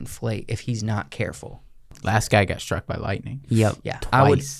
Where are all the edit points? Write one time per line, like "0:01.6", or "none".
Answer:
0:01.9